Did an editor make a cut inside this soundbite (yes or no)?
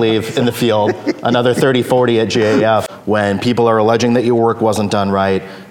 yes